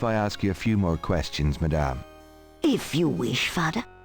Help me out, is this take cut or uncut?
uncut